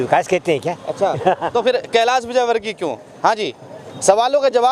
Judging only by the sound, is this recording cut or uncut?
uncut